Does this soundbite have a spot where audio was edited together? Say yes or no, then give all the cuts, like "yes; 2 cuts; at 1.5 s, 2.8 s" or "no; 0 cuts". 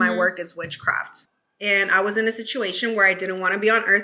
yes; 1 cut; at 1.2 s